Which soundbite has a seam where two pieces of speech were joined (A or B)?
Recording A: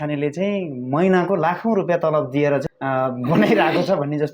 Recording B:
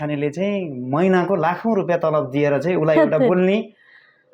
A